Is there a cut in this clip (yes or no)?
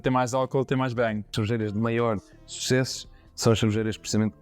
yes